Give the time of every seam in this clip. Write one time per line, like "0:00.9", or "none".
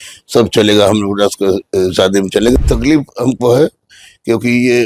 0:02.5

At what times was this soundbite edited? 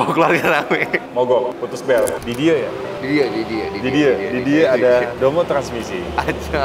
0:02.1

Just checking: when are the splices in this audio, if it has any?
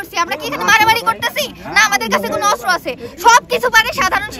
none

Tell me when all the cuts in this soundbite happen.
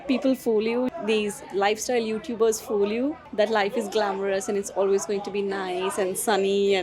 none

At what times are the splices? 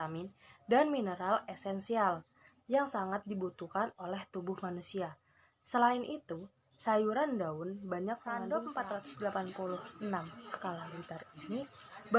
0:08.4

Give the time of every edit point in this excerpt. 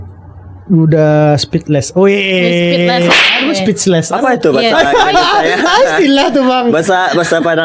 none

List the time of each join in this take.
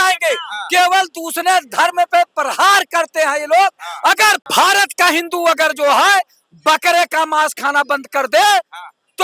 0:04.4

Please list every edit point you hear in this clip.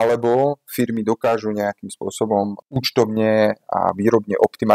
0:02.6

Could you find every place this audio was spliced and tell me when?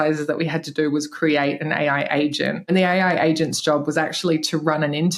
0:02.7

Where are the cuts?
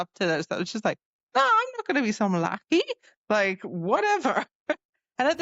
none

